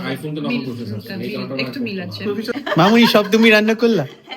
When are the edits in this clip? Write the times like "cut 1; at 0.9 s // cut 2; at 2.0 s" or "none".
cut 1; at 2.5 s